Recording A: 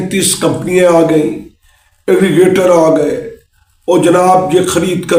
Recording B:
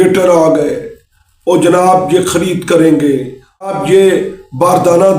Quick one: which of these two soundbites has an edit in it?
B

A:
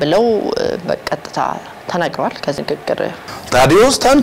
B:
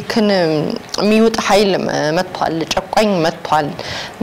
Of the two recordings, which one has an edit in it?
A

